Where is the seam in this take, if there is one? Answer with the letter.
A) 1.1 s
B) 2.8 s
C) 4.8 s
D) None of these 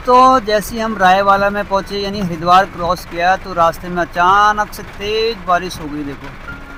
D